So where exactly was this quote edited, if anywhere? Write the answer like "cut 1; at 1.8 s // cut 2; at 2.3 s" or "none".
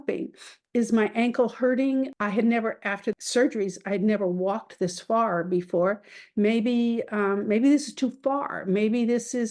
cut 1; at 2.1 s // cut 2; at 3.2 s